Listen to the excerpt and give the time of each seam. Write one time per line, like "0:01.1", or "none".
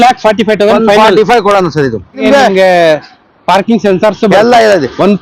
0:02.2